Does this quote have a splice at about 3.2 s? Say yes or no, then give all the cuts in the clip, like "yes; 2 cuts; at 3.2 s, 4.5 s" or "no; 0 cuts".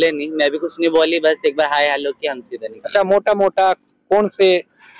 no; 0 cuts